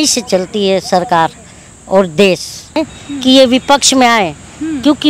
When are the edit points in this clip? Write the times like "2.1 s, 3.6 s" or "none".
2.9 s